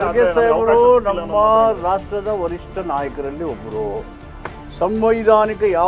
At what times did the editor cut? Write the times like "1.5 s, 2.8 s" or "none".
none